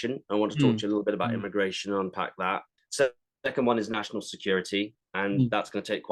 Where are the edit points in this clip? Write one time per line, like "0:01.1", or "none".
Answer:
0:02.8